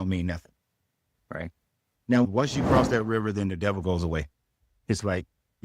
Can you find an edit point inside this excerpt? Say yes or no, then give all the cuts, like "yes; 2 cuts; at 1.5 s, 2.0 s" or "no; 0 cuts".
yes; 1 cut; at 2.2 s